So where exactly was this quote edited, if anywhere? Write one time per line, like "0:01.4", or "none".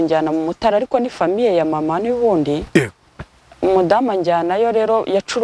none